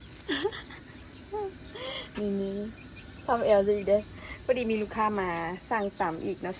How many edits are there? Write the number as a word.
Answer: zero